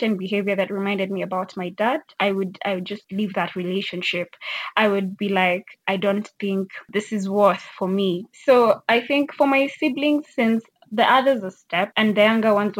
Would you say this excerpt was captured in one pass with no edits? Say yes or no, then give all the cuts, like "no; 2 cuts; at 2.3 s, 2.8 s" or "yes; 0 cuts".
yes; 0 cuts